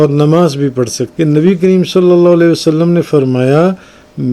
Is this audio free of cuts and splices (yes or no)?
no